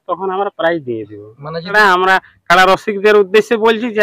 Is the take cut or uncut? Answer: cut